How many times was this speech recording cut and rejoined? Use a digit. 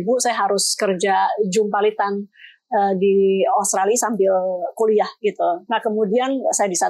1